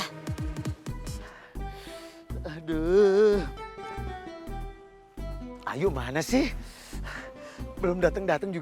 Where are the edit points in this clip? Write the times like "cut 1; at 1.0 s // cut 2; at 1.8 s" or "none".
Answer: cut 1; at 0.9 s